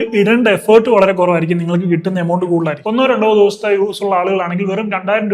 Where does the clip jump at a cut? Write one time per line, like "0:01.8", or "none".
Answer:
0:02.8